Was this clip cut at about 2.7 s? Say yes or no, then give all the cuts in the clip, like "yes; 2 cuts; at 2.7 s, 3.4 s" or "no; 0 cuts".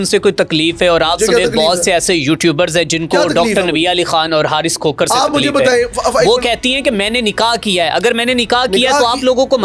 no; 0 cuts